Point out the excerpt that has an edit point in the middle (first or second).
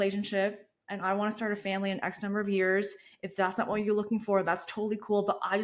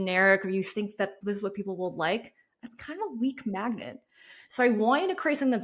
second